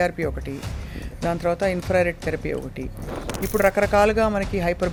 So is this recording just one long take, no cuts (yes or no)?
yes